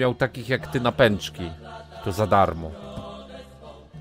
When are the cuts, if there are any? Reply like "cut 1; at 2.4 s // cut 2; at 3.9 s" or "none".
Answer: none